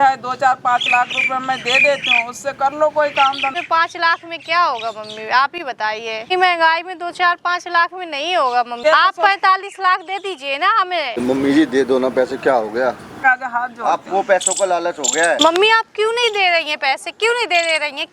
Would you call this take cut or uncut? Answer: cut